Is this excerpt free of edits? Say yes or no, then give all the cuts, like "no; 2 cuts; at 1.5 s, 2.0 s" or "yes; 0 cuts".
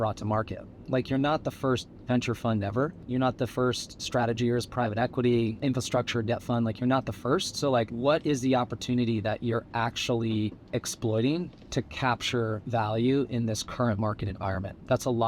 no; 4 cuts; at 3.0 s, 3.9 s, 5.6 s, 7.9 s